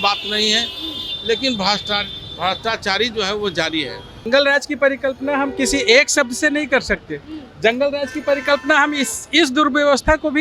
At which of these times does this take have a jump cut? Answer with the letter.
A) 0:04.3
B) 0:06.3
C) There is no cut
A